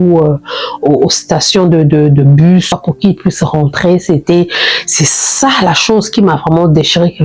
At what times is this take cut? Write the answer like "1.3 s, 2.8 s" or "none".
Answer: 2.8 s